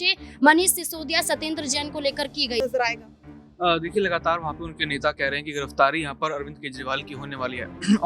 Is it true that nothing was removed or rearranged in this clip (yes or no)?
no